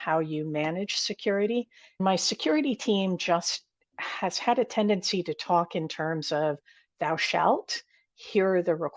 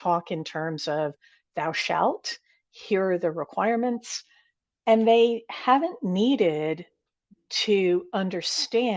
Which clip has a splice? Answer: first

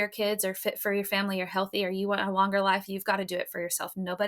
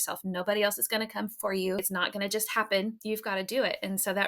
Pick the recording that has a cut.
second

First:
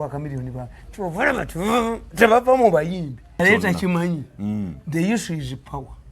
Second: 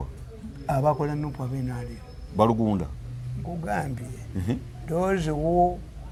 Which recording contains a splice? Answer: first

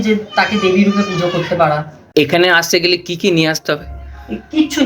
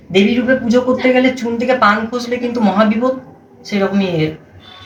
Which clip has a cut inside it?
first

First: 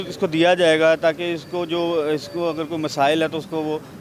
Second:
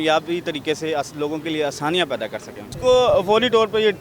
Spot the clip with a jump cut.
second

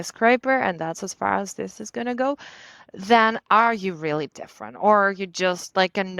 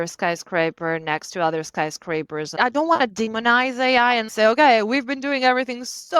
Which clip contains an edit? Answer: second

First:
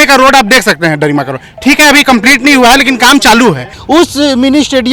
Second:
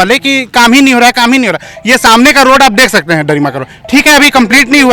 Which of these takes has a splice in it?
first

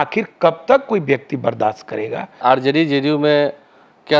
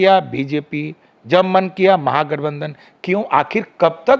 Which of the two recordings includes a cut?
first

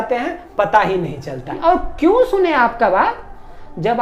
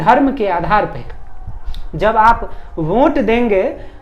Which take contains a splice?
first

